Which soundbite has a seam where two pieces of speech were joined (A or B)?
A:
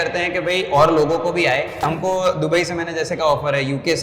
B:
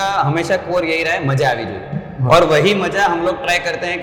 A